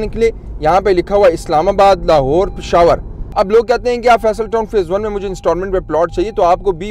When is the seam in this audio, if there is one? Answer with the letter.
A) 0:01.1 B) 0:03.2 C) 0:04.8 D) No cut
B